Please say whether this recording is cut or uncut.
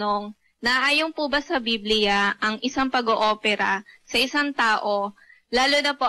uncut